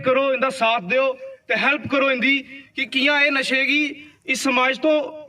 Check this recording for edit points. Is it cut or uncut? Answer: uncut